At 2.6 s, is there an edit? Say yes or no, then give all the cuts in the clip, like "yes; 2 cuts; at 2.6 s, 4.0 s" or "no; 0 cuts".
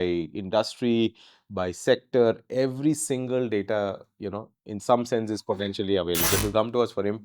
no; 1 cut; at 6.2 s